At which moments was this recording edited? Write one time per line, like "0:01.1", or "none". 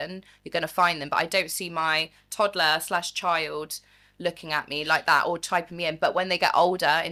none